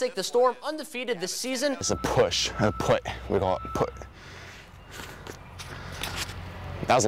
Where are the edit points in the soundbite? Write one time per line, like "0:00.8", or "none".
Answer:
0:01.9